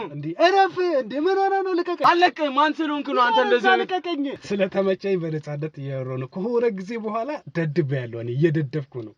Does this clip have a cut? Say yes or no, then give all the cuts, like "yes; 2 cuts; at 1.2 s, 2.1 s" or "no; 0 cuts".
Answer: yes; 2 cuts; at 1.9 s, 4.4 s